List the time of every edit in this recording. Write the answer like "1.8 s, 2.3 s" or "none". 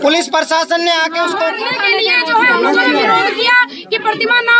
1.5 s